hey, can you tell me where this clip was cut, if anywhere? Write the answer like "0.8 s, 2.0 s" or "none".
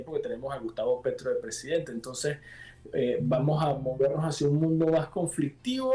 none